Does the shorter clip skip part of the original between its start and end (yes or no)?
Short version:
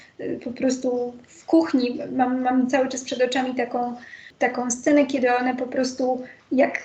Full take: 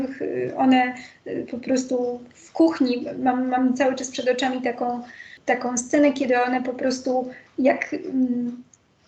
no